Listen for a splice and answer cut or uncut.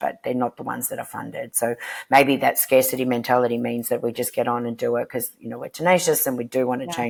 uncut